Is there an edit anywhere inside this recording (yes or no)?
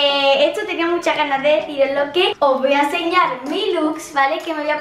no